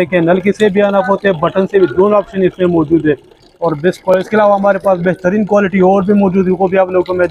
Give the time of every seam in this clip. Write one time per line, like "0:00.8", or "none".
none